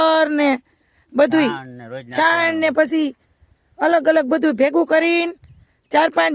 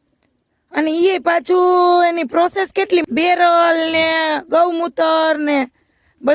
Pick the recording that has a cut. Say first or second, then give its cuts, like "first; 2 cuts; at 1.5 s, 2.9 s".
second; 1 cut; at 3.0 s